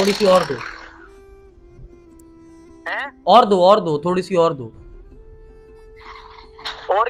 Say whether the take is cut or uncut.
uncut